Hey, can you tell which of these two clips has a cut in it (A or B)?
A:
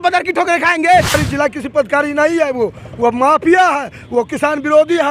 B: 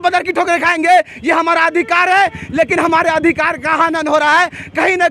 A